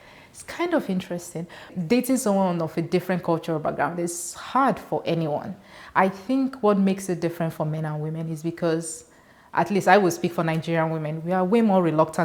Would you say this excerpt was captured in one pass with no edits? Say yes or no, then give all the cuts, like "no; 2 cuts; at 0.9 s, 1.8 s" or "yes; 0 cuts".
no; 1 cut; at 1.7 s